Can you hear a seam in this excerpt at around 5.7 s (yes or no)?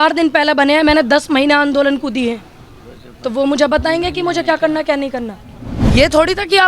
yes